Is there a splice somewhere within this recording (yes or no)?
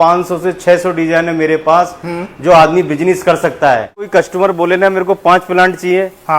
yes